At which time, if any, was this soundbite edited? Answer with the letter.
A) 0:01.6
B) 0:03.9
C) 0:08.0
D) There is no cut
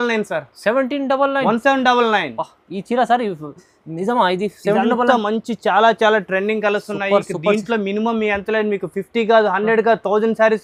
D